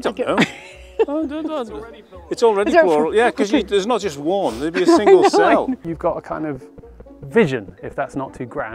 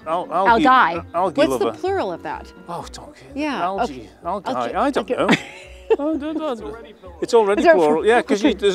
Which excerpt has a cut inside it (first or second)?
first